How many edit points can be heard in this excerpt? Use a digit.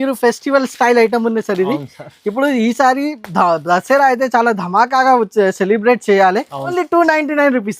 1